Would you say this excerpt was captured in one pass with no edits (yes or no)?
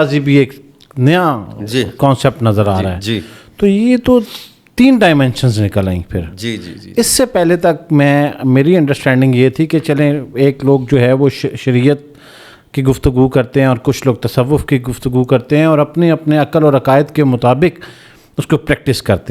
yes